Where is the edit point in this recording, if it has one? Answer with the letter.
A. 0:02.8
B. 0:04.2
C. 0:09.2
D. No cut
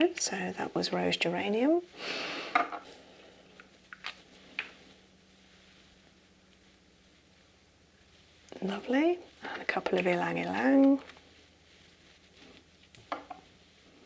A